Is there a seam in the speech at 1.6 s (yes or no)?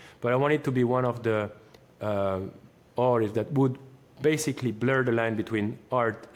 no